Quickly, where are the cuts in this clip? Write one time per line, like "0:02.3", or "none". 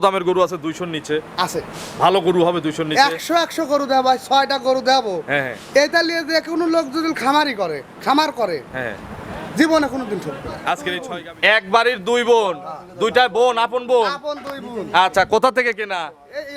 0:10.9